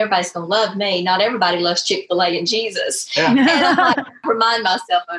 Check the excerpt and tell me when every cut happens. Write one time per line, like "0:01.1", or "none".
0:04.2